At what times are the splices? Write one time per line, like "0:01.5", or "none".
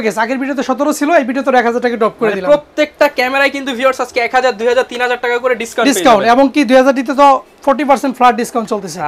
none